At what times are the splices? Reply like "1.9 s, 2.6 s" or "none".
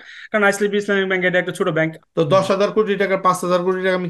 2.0 s

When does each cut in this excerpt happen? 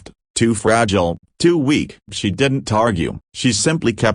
3.2 s

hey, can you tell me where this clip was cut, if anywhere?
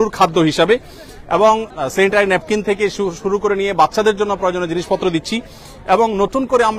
none

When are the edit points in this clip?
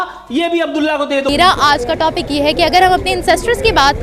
1.3 s

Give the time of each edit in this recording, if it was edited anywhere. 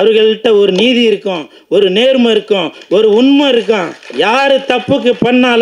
4.0 s

